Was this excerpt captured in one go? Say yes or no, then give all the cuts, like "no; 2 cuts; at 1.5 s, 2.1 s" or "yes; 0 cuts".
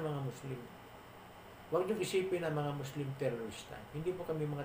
yes; 0 cuts